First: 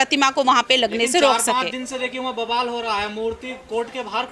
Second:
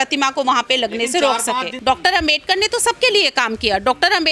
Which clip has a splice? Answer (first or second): second